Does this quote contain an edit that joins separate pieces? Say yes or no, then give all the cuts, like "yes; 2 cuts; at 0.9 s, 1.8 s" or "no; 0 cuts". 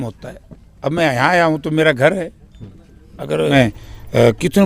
yes; 1 cut; at 3.5 s